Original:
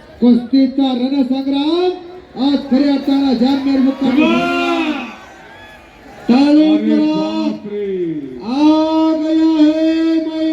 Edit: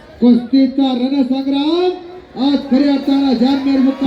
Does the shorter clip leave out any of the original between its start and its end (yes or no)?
no